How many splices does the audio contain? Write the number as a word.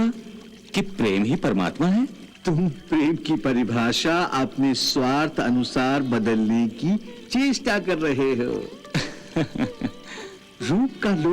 one